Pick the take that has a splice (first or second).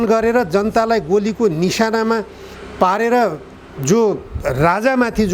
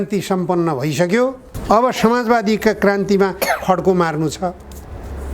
second